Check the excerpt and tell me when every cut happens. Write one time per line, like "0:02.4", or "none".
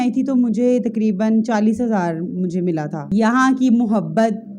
0:03.0